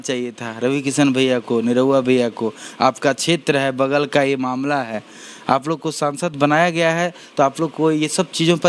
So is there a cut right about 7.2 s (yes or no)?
no